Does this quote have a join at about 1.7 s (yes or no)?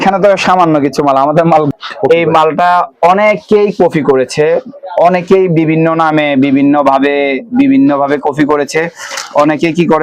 yes